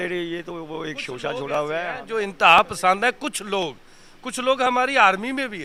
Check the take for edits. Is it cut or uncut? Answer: uncut